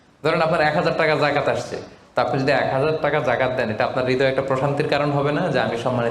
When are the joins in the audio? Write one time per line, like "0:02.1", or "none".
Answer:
none